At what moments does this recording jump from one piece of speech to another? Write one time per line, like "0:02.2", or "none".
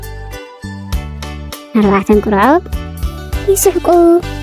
none